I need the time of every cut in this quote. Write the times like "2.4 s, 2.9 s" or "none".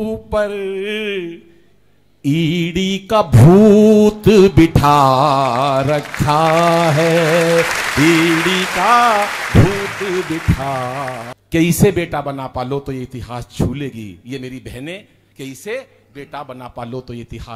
11.3 s